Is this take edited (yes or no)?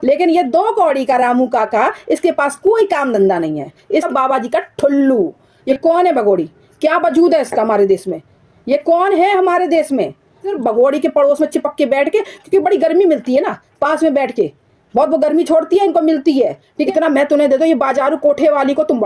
yes